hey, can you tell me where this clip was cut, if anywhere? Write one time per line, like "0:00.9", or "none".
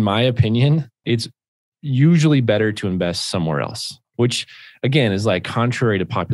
0:00.9